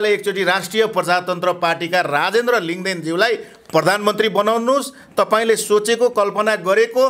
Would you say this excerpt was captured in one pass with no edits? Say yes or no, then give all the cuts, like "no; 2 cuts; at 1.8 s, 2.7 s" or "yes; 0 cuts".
yes; 0 cuts